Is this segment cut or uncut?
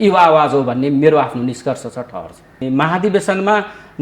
cut